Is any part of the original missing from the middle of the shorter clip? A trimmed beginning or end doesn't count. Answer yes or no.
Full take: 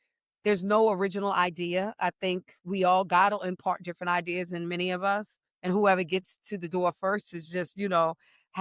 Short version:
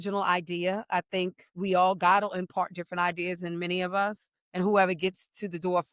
no